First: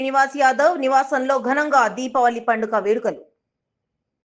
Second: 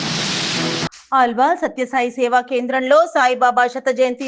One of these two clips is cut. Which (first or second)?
second